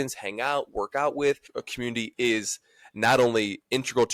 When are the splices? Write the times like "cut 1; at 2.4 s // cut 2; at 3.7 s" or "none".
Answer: cut 1; at 1.5 s